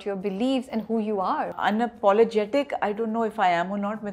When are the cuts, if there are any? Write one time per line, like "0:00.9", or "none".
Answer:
0:01.5